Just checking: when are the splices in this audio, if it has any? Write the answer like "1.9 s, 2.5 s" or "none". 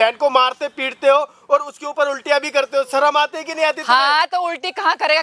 none